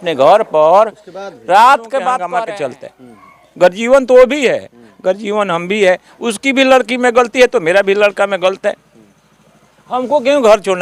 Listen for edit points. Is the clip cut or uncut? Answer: cut